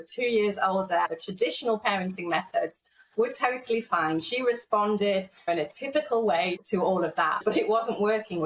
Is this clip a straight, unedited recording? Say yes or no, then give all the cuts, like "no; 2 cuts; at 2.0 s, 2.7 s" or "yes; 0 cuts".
no; 2 cuts; at 1.1 s, 7.4 s